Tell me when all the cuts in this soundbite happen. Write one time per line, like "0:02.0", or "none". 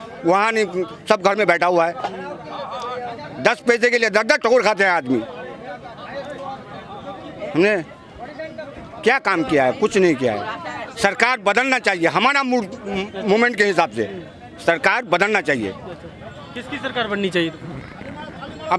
none